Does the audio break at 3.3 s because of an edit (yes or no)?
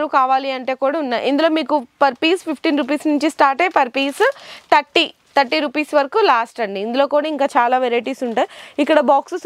no